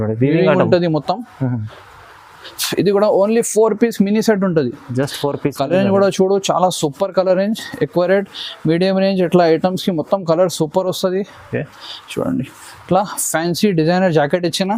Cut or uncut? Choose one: uncut